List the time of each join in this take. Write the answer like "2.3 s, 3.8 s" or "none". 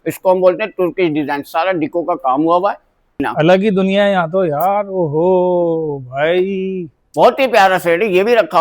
3.2 s